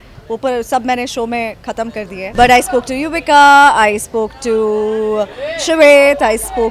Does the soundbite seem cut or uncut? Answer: cut